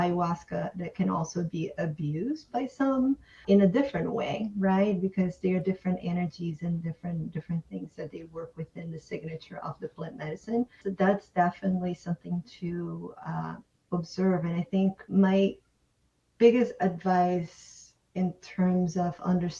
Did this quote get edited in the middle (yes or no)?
yes